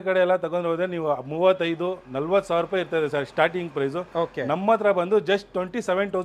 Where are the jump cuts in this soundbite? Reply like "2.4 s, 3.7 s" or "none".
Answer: none